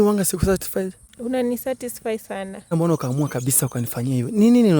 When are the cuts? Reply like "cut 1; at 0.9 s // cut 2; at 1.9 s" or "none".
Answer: cut 1; at 1.1 s // cut 2; at 2.7 s